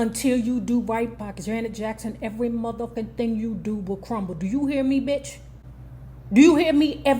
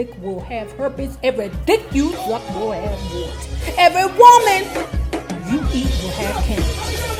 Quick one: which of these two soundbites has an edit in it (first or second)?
first